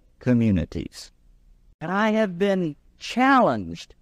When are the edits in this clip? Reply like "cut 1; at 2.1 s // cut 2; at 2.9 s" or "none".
cut 1; at 1.8 s